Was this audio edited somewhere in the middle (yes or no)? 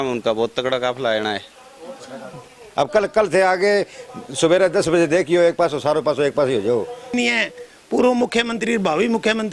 yes